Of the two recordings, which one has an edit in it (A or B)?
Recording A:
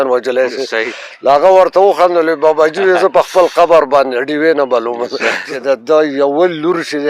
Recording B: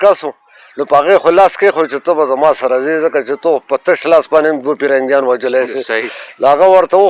A